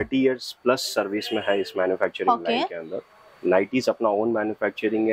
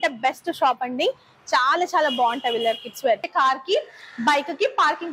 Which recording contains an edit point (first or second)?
second